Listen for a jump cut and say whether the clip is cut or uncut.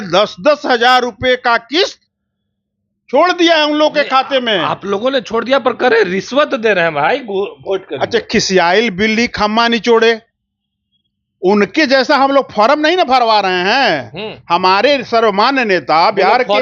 uncut